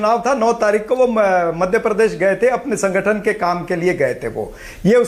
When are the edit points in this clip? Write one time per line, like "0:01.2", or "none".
none